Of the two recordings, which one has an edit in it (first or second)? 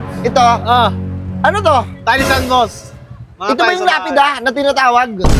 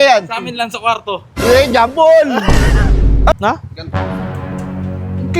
second